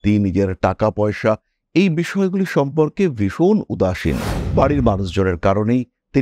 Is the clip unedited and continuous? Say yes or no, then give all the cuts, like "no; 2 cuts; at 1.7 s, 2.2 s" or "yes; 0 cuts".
no; 1 cut; at 4.3 s